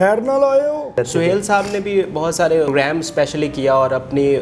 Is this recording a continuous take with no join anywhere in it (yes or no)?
no